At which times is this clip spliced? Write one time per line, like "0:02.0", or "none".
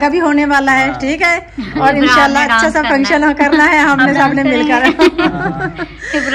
none